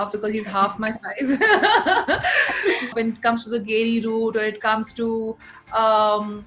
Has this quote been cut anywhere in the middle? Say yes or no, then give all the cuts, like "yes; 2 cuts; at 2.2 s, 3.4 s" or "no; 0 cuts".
yes; 1 cut; at 2.9 s